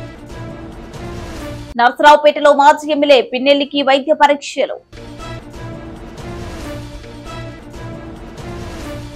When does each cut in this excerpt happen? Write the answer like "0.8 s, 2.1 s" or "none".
1.6 s